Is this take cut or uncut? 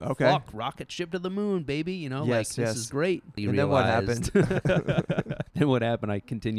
cut